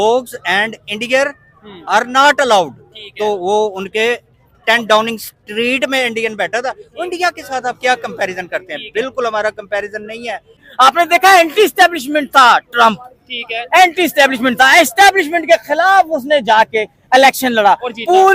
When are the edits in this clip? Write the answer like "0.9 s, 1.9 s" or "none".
10.6 s